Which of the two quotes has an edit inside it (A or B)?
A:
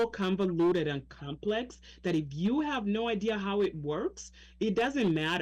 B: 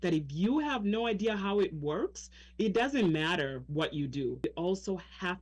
B